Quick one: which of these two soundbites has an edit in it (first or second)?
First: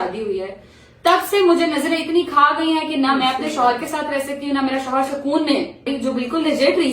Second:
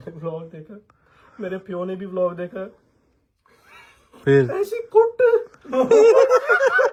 first